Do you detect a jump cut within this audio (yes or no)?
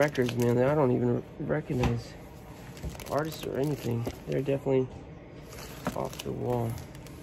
no